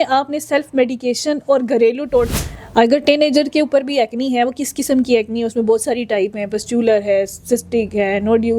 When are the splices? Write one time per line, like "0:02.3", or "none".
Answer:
0:02.4